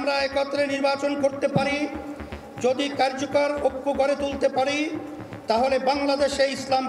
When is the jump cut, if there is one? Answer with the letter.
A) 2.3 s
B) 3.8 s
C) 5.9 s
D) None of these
D